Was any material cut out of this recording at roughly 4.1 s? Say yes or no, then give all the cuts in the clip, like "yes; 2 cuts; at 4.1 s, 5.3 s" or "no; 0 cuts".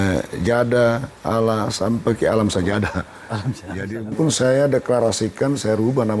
yes; 1 cut; at 4.1 s